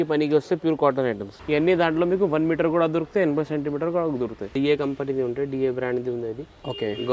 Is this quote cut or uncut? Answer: cut